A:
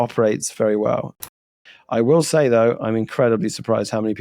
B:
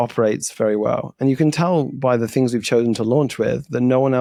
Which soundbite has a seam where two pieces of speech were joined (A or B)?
A